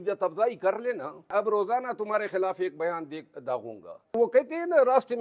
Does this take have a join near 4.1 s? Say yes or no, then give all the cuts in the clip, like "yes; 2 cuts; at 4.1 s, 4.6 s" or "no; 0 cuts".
yes; 2 cuts; at 1.3 s, 4.1 s